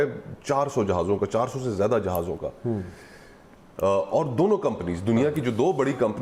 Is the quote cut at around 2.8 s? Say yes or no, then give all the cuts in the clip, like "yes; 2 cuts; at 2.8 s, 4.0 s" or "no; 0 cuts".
no; 0 cuts